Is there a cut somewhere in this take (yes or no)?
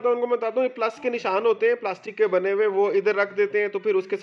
no